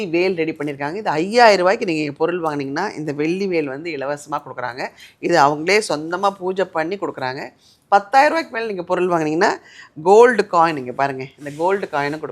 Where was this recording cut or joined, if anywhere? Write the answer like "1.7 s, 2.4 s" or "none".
none